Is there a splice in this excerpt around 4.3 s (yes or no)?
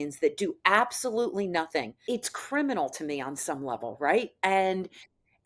no